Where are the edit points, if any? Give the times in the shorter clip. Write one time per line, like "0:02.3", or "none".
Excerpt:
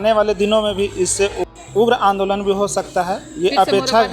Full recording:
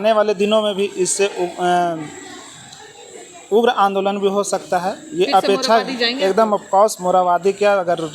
0:01.5

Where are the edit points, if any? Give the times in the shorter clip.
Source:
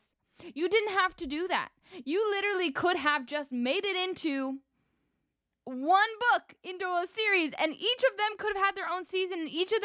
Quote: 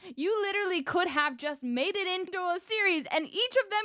0:02.3

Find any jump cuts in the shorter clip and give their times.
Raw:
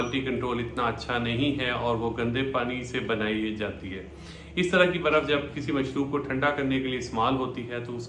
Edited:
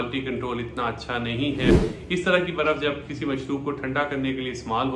0:01.7

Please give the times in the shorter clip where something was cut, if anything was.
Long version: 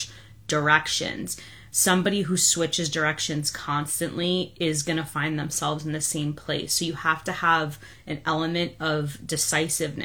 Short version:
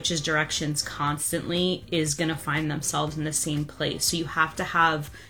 none

